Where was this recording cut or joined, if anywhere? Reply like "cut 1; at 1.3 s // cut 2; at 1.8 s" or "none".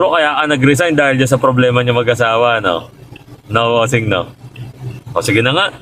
none